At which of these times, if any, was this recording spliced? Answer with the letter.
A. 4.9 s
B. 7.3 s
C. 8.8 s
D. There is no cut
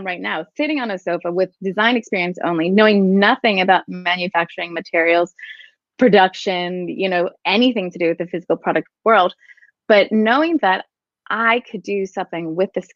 D